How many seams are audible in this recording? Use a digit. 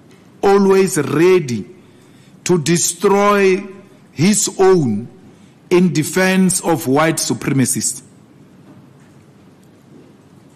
0